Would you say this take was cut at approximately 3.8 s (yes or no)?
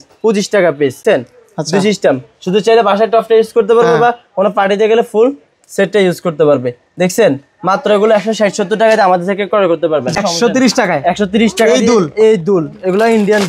no